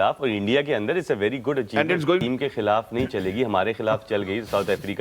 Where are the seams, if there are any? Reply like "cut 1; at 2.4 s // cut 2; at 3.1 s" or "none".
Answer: cut 1; at 2.2 s

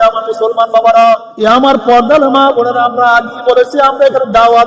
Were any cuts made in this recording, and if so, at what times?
cut 1; at 1.3 s

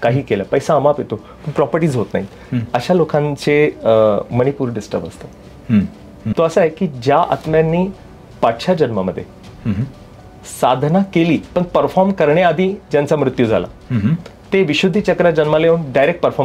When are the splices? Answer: cut 1; at 6.2 s

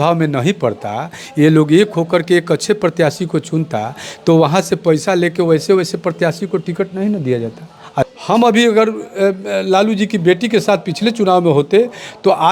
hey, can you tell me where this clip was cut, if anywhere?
none

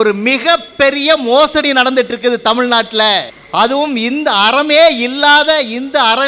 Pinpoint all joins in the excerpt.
cut 1; at 3.4 s

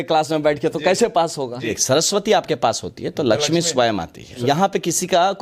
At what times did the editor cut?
cut 1; at 1.8 s // cut 2; at 4.4 s

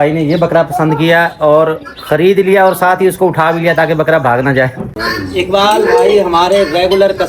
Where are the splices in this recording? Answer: cut 1; at 4.9 s

